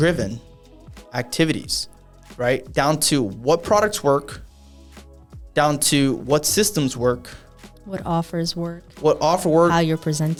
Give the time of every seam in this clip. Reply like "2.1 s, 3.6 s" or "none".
none